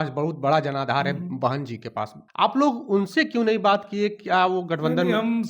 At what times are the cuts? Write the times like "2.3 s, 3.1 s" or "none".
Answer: 2.2 s